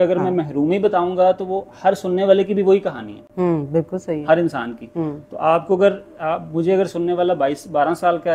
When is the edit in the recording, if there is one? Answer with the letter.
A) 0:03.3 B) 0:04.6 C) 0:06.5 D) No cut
D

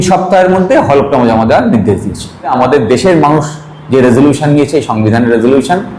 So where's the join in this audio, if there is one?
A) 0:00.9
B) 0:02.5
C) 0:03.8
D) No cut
B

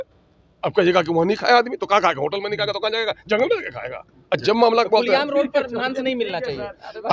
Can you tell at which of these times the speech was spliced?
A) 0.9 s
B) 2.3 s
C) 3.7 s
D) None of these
D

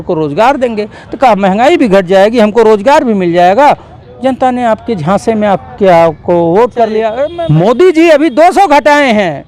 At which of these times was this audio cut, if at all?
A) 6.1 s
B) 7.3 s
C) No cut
B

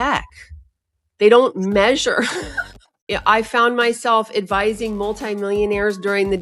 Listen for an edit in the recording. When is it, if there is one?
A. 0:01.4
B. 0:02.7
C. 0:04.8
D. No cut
B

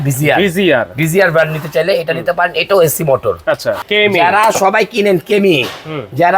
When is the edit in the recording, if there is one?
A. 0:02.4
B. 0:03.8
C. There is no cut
B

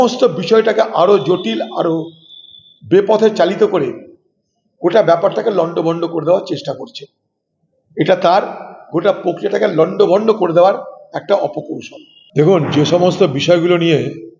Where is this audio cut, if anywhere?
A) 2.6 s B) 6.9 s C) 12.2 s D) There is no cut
C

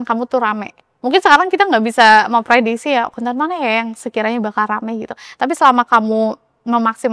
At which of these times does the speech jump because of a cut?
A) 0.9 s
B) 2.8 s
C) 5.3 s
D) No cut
D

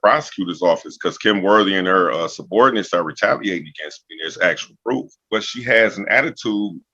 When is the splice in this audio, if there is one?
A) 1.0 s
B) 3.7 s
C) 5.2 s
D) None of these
C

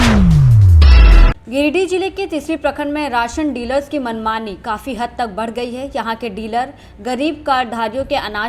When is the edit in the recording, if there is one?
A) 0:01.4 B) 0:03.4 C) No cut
A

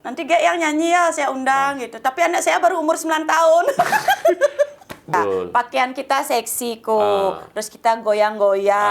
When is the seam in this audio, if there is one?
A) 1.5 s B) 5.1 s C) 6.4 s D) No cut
B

